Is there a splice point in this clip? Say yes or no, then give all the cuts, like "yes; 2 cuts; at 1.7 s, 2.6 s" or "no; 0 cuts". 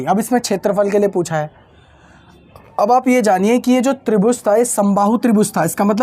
no; 0 cuts